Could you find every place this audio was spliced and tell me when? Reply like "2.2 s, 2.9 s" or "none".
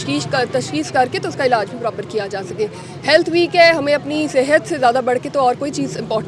none